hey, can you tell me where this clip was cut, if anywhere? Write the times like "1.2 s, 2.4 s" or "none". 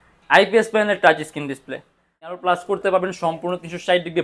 2.3 s